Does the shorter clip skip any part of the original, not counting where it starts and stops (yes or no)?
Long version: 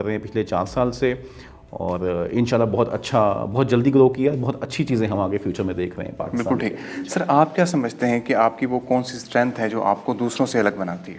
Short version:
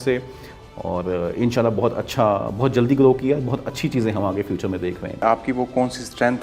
yes